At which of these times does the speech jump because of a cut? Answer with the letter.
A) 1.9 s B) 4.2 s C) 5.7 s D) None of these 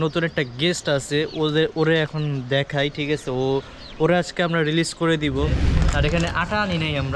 C